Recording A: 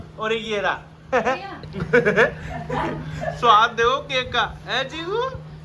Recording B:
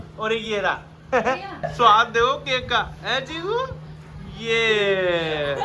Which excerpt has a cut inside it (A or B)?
B